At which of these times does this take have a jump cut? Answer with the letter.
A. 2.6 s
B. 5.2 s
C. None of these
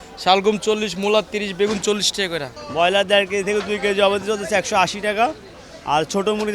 A